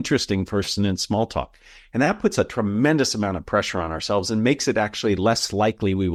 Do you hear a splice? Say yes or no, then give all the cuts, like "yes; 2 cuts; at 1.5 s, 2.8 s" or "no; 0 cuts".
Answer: no; 0 cuts